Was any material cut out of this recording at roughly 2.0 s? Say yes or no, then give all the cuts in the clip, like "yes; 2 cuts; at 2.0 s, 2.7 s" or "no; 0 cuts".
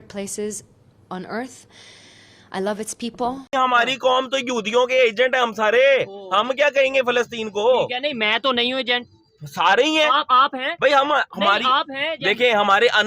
no; 1 cut; at 3.4 s